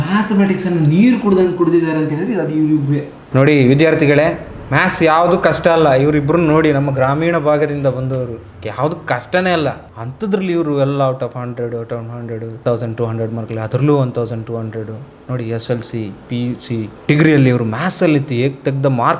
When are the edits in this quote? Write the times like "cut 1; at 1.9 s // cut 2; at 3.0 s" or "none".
cut 1; at 3.2 s

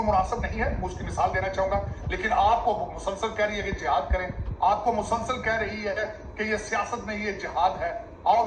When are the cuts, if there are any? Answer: cut 1; at 2.0 s

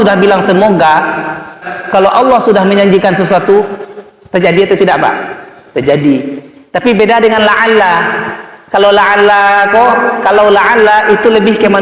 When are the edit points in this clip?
cut 1; at 1.7 s

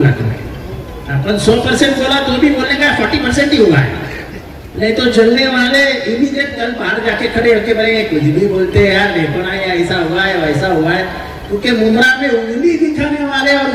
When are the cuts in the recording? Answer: none

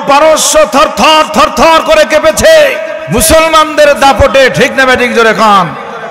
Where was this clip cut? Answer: cut 1; at 2.9 s

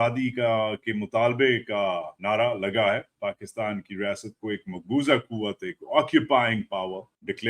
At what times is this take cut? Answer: cut 1; at 3.1 s

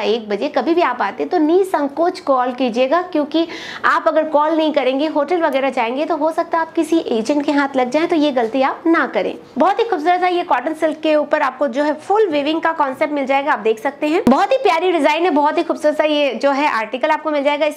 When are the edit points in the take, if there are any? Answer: cut 1; at 9.4 s // cut 2; at 14.2 s

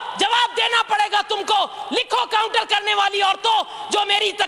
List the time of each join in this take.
none

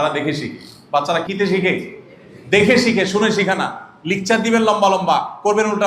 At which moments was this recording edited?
cut 1; at 1.2 s

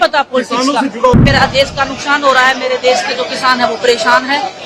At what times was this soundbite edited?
cut 1; at 1.1 s

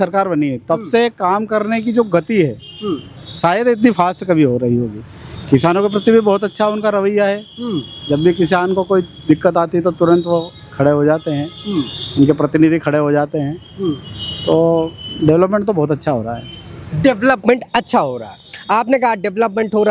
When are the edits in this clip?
none

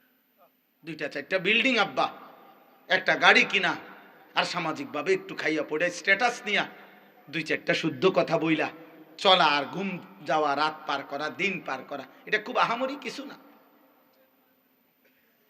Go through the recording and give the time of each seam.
cut 1; at 1.0 s

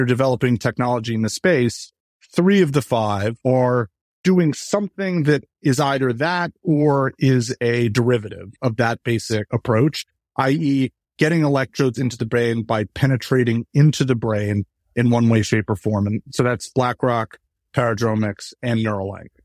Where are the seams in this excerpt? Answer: cut 1; at 3.4 s // cut 2; at 8.5 s // cut 3; at 9.5 s // cut 4; at 14.9 s

